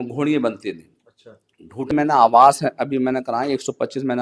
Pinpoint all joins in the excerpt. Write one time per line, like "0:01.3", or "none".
0:01.9